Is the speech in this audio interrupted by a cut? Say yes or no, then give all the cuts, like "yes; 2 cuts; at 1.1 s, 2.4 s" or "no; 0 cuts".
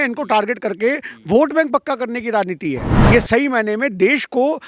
yes; 1 cut; at 2.9 s